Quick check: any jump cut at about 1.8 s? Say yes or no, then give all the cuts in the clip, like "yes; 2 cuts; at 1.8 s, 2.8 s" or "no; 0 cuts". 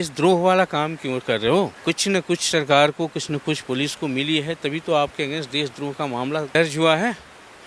yes; 2 cuts; at 1.8 s, 6.6 s